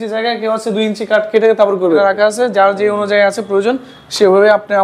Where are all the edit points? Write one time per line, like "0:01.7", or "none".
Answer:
0:02.0